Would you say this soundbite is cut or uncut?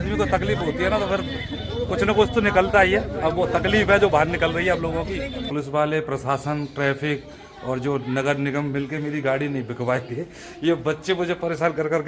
cut